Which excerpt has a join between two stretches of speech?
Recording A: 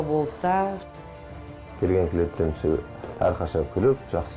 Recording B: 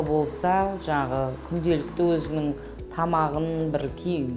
A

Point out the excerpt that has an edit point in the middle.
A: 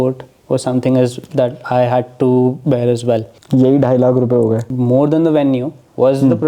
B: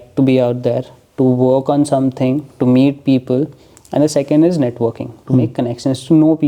A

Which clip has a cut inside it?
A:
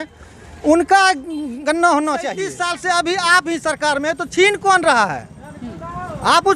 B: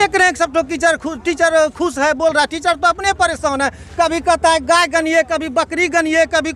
A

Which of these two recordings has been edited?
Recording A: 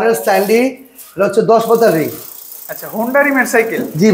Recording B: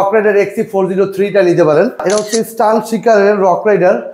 B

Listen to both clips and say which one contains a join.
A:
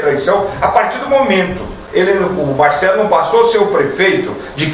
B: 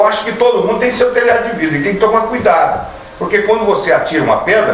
A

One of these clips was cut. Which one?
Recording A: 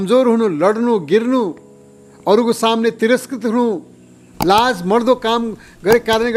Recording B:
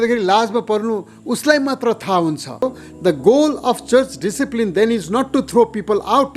B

